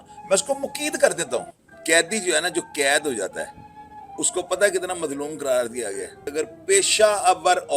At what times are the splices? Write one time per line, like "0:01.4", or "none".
0:01.6
0:06.2

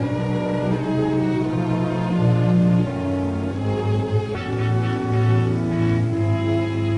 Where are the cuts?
0:01.3

